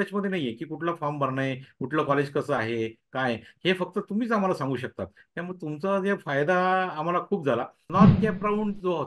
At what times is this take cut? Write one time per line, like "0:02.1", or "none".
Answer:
0:07.9